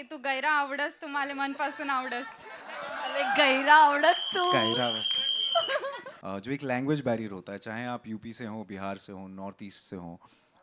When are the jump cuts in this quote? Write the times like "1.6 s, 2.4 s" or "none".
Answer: 6.1 s